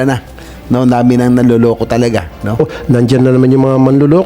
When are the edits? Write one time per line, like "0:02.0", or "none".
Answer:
0:02.7